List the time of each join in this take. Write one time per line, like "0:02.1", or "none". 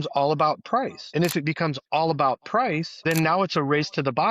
0:01.0
0:02.9

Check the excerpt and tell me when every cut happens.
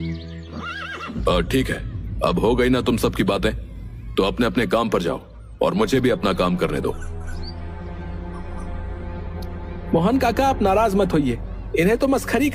none

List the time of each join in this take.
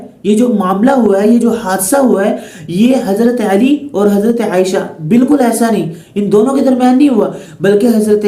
none

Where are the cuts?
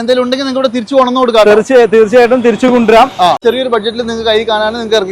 0:03.4

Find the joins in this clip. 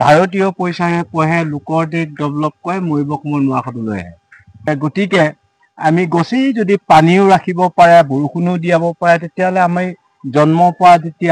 0:04.7

